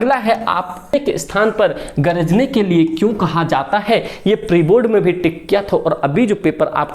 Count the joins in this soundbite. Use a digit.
1